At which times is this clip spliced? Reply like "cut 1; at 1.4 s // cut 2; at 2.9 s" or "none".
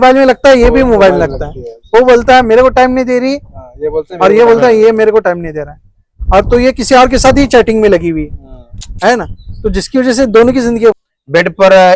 cut 1; at 11.0 s